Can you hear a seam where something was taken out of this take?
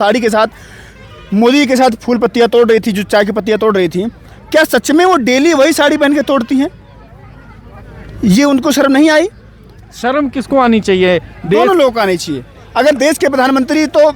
no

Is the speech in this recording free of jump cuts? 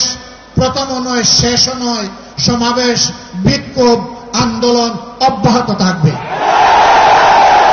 yes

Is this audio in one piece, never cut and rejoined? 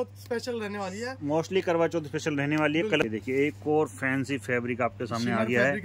no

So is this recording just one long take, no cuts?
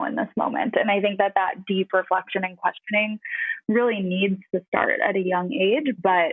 yes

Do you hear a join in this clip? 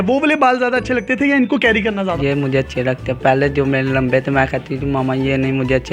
no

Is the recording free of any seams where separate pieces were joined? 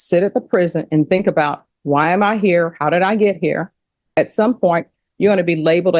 no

